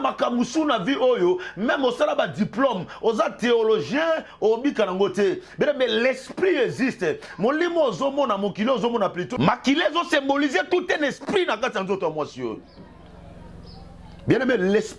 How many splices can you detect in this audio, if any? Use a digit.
1